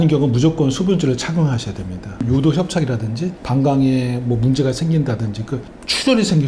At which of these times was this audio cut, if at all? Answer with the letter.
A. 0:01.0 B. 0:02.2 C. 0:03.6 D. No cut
B